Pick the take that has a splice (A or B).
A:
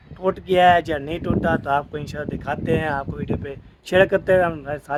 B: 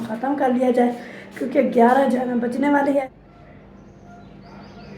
B